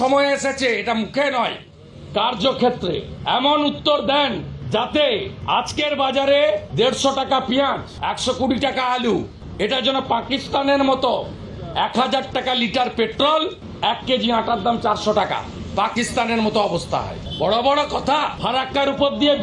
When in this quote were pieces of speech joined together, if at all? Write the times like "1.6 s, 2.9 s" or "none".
3.1 s, 4.5 s, 5.3 s, 6.7 s, 7.9 s, 9.4 s, 13.6 s, 17.2 s, 18.4 s